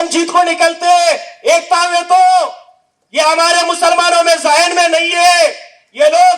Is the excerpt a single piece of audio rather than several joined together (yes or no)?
yes